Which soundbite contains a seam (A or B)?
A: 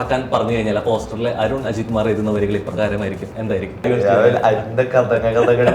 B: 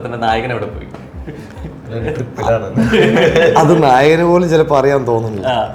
A